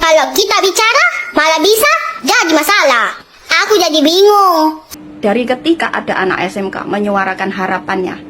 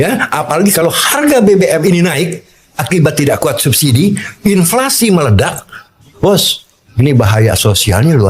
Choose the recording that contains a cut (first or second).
first